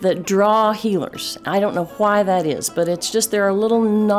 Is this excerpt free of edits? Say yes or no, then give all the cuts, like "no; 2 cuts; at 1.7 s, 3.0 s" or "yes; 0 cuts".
yes; 0 cuts